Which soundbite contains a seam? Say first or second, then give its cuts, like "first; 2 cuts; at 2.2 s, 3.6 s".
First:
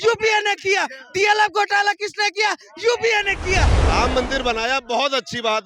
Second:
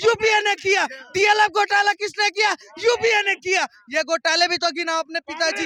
first; 1 cut; at 3.8 s